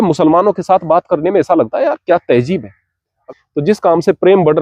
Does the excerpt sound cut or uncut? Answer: cut